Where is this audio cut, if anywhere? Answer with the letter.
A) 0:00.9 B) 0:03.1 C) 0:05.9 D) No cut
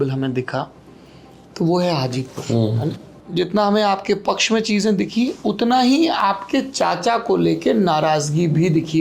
B